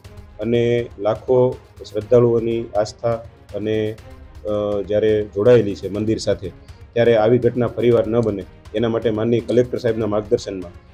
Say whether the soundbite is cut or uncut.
uncut